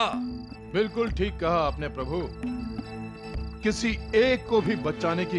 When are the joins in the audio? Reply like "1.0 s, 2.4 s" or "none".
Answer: none